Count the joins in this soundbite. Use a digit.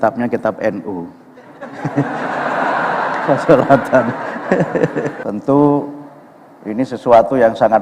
1